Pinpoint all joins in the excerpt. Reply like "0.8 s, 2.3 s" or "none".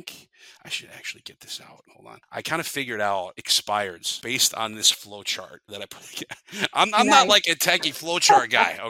1.9 s, 3.5 s, 4.1 s, 5.6 s